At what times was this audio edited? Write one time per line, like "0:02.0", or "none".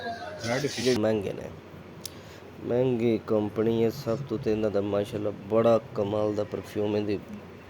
0:01.0